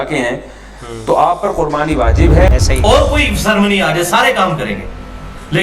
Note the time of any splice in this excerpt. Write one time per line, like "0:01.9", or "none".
0:02.5